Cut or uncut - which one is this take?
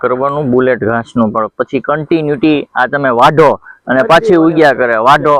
uncut